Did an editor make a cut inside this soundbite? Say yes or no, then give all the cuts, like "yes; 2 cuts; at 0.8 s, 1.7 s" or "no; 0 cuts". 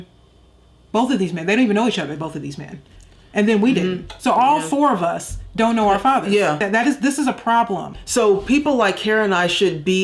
yes; 1 cut; at 6.6 s